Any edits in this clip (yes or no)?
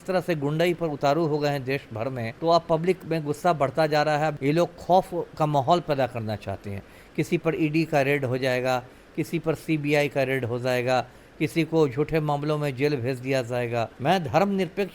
yes